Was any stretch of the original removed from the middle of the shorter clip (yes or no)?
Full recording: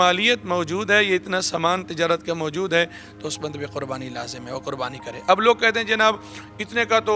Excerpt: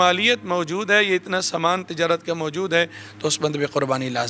no